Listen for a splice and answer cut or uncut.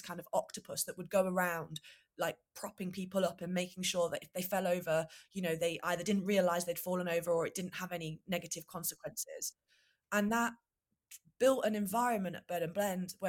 uncut